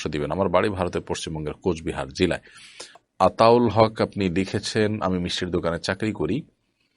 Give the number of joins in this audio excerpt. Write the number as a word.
one